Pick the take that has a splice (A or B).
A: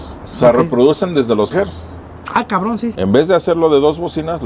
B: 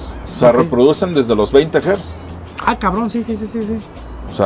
A